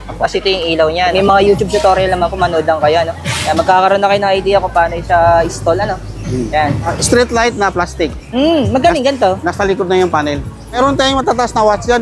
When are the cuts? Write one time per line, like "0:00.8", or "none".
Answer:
0:01.1
0:07.0
0:10.8